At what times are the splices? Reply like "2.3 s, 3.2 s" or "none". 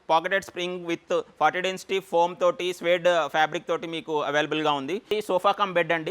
5.1 s